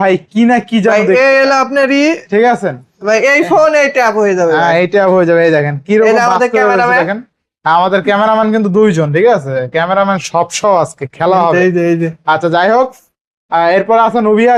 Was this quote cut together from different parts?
no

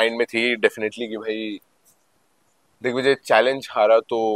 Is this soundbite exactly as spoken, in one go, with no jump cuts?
yes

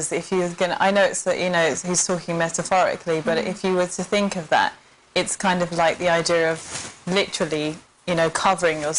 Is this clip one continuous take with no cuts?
no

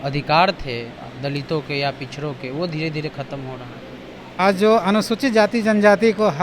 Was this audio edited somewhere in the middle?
yes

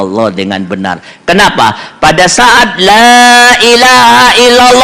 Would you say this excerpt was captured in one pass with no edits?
yes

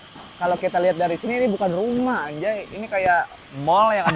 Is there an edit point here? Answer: no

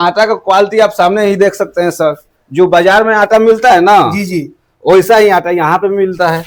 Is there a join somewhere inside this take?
no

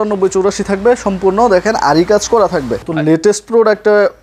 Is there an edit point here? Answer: yes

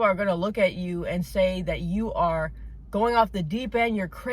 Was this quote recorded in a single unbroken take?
yes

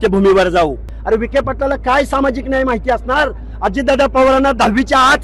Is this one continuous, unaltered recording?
no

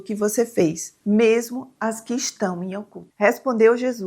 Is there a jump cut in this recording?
yes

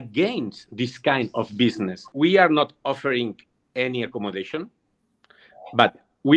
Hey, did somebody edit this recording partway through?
yes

